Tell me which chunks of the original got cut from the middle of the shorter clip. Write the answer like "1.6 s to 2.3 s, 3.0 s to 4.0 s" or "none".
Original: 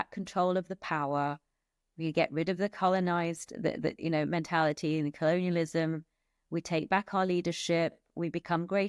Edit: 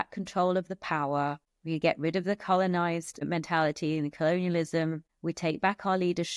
1.5 s to 1.8 s, 3.6 s to 4.3 s, 6.1 s to 6.4 s